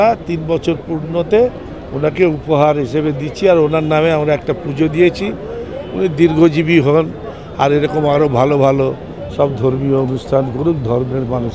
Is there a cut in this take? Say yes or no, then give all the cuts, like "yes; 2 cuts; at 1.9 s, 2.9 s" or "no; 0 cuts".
no; 0 cuts